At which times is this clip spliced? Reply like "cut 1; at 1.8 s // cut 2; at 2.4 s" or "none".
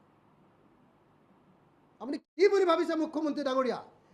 cut 1; at 2.2 s